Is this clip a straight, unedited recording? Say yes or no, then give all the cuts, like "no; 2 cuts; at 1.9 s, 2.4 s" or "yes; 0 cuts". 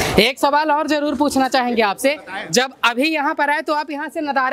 yes; 0 cuts